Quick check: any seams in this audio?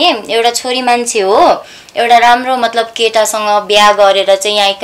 no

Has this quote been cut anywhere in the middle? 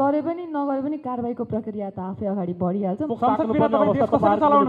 yes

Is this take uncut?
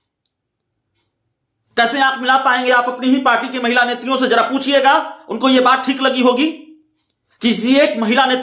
yes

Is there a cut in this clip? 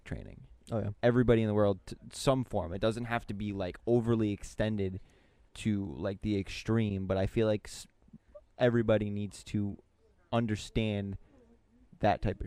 no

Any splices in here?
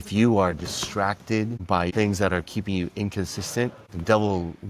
yes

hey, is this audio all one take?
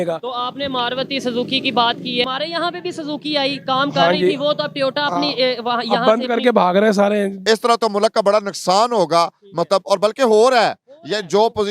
no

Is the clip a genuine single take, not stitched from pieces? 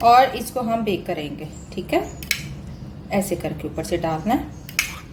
yes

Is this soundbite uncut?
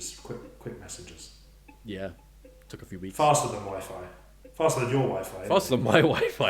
yes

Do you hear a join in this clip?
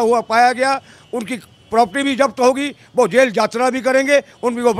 no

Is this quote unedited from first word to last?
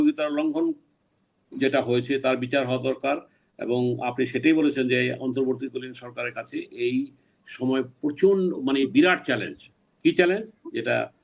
yes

